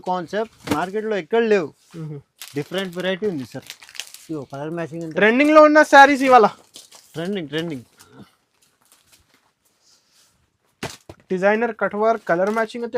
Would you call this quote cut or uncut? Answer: uncut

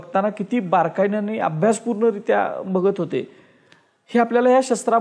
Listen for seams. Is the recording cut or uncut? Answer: uncut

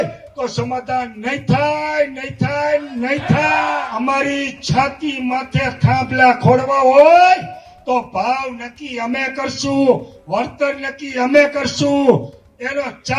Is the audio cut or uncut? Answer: cut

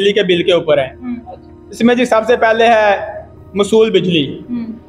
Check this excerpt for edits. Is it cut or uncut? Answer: uncut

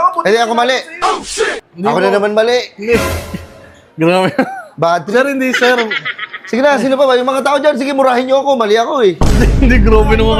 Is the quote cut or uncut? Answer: uncut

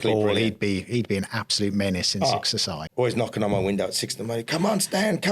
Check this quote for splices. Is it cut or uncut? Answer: cut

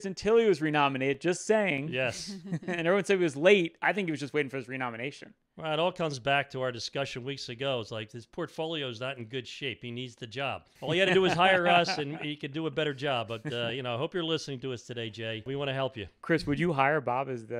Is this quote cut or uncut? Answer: cut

